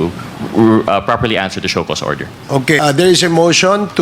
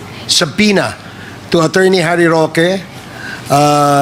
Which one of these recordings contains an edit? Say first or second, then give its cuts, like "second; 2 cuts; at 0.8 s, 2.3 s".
first; 1 cut; at 2.8 s